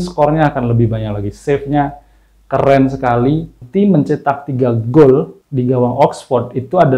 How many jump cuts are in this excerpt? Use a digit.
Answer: 1